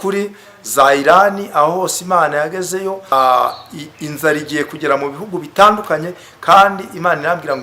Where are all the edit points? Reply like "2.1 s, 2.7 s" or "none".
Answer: 3.1 s